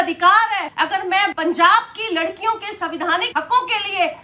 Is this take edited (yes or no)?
yes